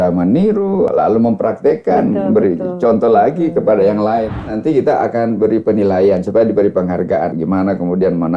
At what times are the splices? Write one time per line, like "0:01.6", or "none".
0:00.9
0:04.5
0:07.3

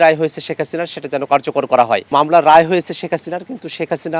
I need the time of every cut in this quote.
0:02.1

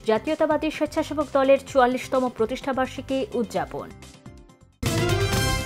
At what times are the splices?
0:04.8

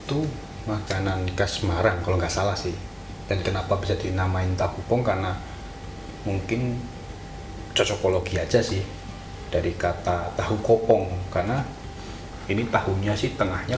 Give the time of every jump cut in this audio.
none

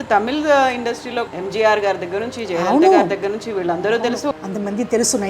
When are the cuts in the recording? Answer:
0:01.3
0:04.3

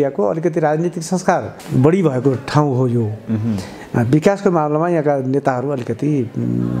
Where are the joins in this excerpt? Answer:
0:01.6

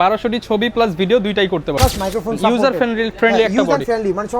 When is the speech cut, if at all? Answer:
0:01.7

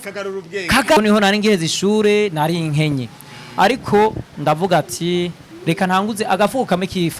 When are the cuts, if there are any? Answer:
0:01.0

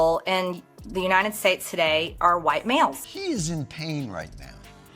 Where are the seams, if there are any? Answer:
0:03.1

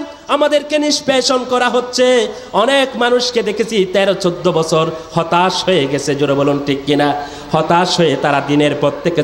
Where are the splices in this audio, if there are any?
none

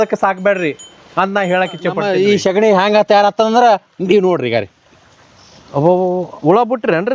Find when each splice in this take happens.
0:02.0

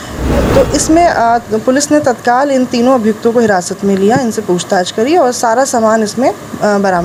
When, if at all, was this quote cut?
none

